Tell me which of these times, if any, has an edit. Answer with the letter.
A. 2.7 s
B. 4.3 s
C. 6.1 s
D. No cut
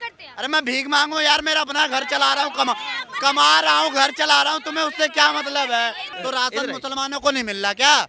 C